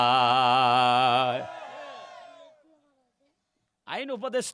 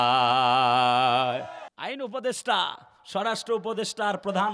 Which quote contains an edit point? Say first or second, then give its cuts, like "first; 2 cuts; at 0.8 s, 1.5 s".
second; 1 cut; at 1.6 s